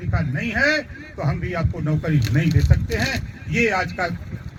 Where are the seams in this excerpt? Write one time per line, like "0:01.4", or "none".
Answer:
none